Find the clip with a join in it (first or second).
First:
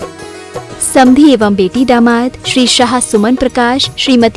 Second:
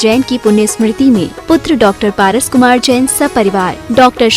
first